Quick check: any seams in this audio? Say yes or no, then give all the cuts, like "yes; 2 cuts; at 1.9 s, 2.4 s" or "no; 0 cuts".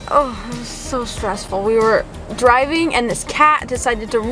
no; 0 cuts